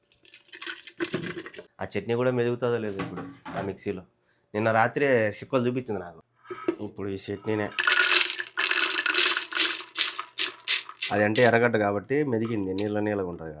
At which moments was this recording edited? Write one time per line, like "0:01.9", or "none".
0:01.6
0:06.2